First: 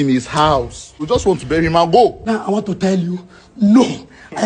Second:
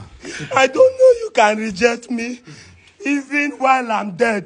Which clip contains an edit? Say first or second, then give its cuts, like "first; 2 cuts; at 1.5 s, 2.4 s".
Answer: first; 2 cuts; at 1.0 s, 2.2 s